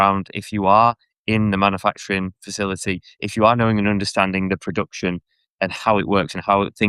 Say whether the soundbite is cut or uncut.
uncut